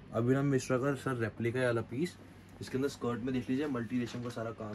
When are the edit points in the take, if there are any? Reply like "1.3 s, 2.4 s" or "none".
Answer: none